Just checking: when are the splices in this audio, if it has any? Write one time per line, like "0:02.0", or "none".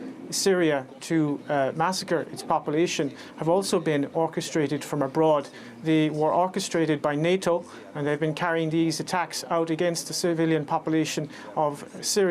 0:05.2